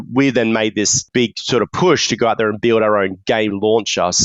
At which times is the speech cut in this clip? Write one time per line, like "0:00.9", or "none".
0:01.0